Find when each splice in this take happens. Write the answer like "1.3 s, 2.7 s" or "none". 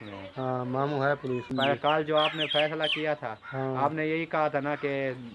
1.8 s